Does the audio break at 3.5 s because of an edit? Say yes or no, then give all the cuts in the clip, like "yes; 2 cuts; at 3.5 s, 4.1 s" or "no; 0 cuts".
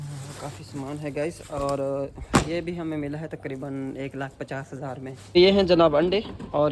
no; 1 cut; at 5.4 s